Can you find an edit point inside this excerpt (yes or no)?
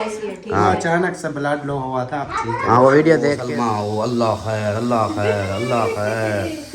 yes